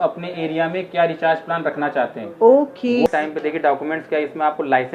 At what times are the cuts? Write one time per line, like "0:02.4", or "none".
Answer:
0:03.1